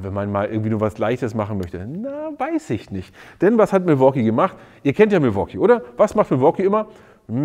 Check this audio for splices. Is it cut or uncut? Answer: uncut